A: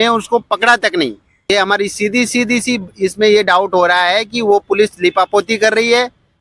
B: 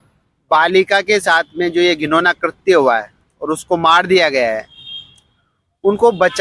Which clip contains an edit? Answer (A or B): A